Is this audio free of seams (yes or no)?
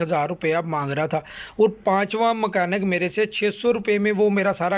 yes